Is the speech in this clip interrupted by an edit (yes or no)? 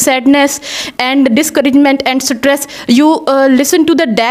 no